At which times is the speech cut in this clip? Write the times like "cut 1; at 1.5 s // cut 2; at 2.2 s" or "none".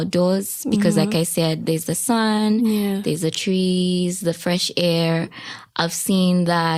none